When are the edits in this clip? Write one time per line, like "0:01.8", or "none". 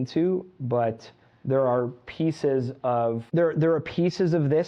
0:03.2